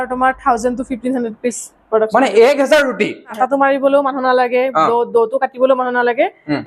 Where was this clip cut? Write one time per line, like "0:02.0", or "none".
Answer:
0:03.3